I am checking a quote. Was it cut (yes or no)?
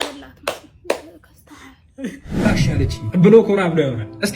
yes